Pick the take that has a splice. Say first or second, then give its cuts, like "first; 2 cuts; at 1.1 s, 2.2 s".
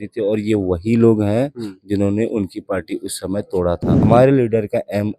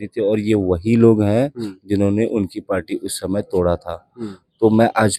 first; 1 cut; at 3.9 s